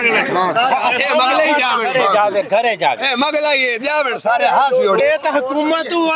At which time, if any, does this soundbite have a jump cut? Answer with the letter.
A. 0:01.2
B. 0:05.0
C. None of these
B